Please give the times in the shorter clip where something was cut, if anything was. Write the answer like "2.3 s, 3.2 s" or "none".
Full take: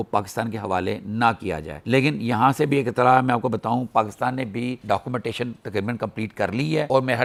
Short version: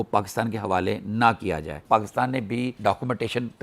1.8 s